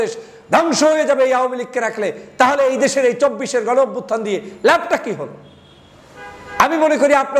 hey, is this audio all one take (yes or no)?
yes